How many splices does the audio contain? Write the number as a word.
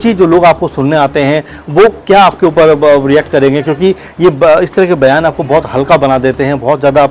zero